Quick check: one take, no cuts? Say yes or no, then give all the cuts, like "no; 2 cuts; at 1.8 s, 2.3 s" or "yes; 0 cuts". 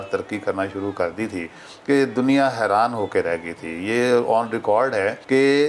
yes; 0 cuts